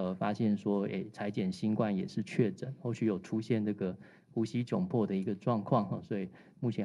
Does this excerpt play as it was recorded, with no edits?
yes; 0 cuts

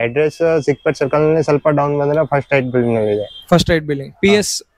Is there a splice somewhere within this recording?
no; 0 cuts

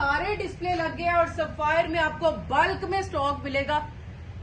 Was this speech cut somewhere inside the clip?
no; 0 cuts

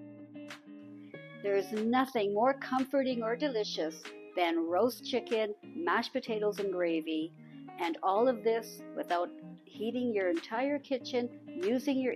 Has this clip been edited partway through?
yes; 1 cut; at 1.4 s

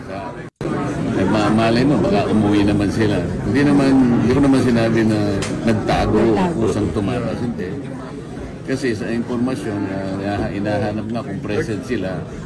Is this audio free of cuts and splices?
yes; 0 cuts

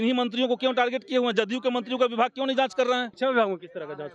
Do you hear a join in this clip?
yes; 1 cut; at 3.1 s

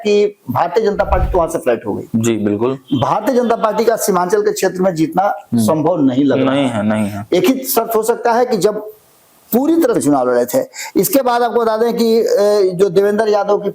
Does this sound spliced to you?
yes; 1 cut; at 10.0 s

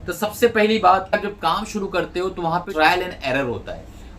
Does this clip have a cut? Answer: yes; 2 cuts; at 1.1 s, 2.7 s

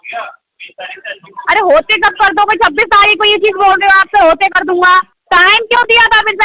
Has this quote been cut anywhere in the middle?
yes; 1 cut; at 5.2 s

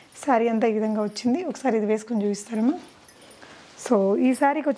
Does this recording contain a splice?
no; 0 cuts

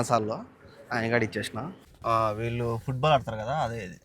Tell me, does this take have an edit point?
yes; 1 cut; at 1.8 s

